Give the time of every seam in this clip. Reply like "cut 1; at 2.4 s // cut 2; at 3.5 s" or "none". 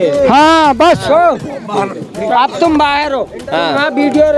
none